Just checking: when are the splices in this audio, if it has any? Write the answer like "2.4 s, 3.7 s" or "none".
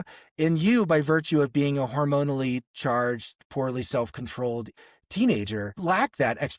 4.7 s, 5.7 s